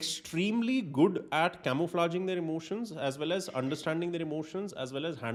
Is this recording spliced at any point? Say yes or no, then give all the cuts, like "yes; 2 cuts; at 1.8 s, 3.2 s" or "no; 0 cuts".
no; 0 cuts